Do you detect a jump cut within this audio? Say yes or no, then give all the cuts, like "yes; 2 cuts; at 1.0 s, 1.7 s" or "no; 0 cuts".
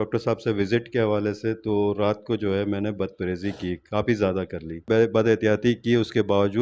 yes; 1 cut; at 4.9 s